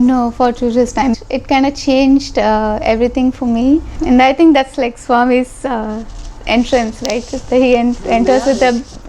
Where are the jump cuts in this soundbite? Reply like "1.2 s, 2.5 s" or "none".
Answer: 1.1 s, 4.0 s